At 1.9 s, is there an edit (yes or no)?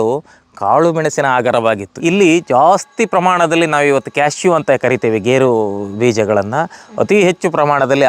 yes